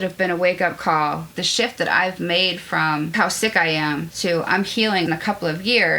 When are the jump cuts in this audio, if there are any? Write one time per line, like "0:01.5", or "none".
0:01.3
0:05.1